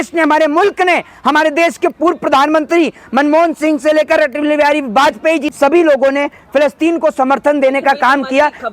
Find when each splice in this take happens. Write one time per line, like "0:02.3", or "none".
0:05.5